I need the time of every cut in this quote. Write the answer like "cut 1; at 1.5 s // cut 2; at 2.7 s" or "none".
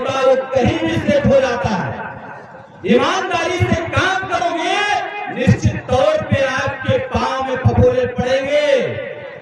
none